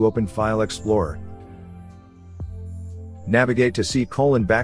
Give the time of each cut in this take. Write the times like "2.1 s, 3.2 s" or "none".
1.1 s, 3.2 s

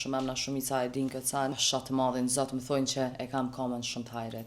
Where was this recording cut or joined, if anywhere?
1.6 s

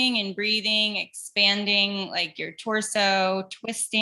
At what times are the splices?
none

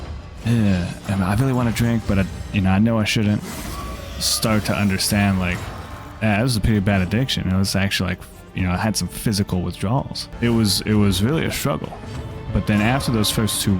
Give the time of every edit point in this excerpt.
3.5 s, 10.2 s

